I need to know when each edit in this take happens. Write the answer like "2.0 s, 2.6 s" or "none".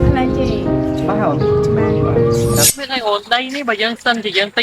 2.7 s